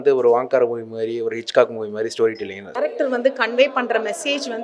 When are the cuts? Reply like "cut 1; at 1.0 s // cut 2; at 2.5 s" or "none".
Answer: cut 1; at 2.8 s